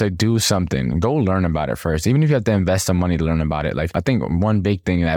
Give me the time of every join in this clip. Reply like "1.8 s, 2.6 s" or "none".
3.9 s